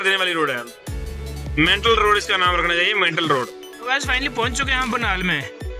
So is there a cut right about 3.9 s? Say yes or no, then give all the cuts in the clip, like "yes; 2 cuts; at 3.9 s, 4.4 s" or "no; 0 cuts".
yes; 1 cut; at 3.9 s